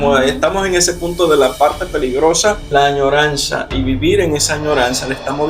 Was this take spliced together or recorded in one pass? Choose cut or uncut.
cut